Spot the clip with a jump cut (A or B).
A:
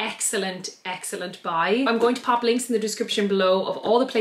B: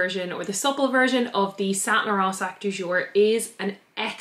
A